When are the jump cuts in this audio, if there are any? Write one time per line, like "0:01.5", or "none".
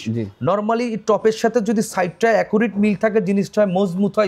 none